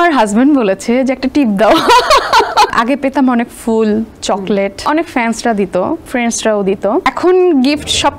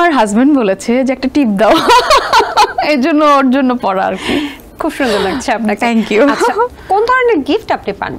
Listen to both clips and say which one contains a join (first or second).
first